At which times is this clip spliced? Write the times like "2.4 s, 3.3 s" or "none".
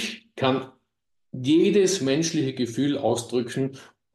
none